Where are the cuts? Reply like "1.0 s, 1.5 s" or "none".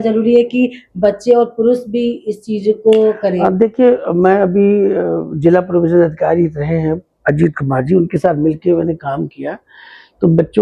none